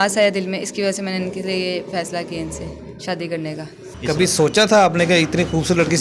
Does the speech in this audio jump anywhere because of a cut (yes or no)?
yes